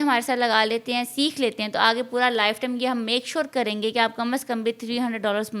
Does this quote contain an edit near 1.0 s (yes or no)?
no